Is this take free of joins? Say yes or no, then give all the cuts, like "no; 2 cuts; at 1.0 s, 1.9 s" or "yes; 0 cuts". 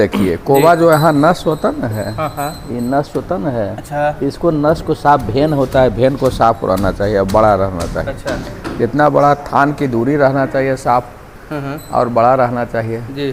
yes; 0 cuts